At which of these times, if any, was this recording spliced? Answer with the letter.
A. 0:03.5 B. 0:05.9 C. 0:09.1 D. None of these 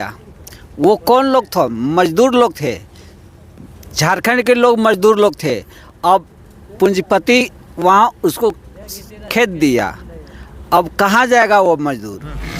D